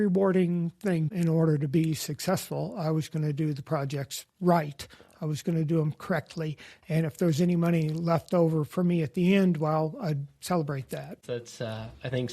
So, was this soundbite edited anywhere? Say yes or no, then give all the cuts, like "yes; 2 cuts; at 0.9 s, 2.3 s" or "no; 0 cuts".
yes; 2 cuts; at 1.1 s, 11.2 s